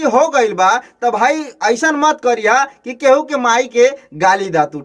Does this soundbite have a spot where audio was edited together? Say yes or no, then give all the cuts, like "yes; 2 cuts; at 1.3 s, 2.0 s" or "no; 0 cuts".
no; 0 cuts